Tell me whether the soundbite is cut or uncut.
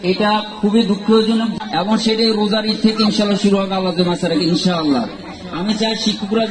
cut